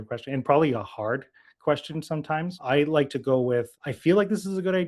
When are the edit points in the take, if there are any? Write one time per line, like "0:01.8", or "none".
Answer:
0:02.6